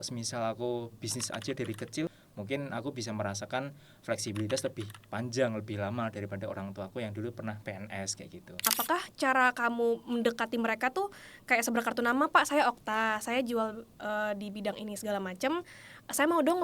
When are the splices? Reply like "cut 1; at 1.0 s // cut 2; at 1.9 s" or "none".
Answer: cut 1; at 2.1 s // cut 2; at 8.7 s